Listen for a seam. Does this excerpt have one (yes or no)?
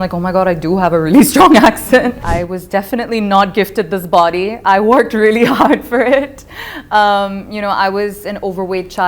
yes